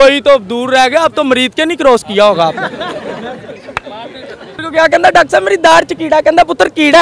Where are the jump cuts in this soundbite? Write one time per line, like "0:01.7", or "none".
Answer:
0:04.6